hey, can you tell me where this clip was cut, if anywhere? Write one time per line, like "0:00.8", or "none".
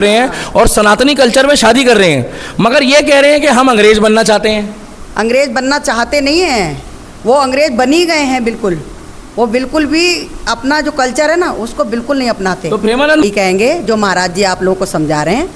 0:13.2